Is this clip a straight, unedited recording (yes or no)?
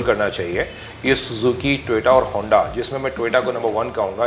yes